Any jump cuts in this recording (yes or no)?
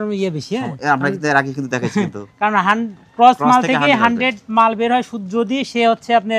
no